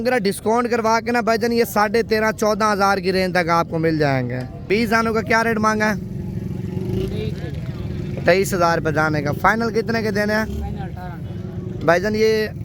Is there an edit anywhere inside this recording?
yes; 1 cut; at 4.6 s

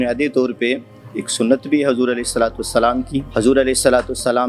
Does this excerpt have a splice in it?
yes; 1 cut; at 3.3 s

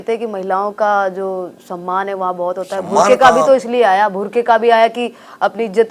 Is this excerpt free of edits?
yes; 0 cuts

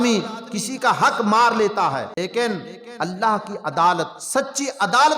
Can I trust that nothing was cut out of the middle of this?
no; 2 cuts; at 2.1 s, 4.2 s

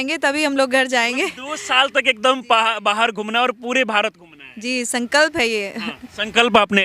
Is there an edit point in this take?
no; 0 cuts

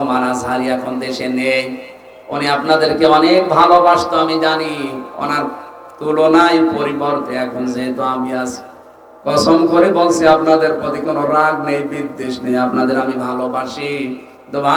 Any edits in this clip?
no; 0 cuts

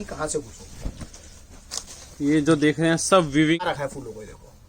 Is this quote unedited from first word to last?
no; 1 cut; at 3.7 s

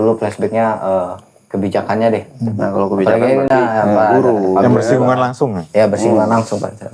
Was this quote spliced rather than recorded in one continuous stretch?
no; 0 cuts

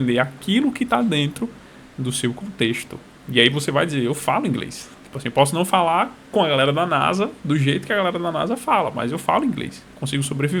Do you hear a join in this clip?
no; 0 cuts

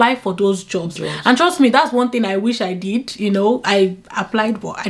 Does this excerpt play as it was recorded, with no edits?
yes; 0 cuts

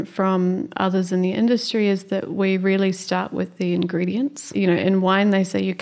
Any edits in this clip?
yes; 1 cut; at 4.4 s

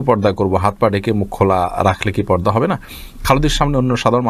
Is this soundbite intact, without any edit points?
yes; 0 cuts

